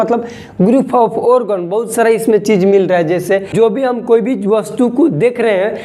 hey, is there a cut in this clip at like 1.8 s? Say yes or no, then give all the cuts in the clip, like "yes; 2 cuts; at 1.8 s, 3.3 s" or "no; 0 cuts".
no; 1 cut; at 3.5 s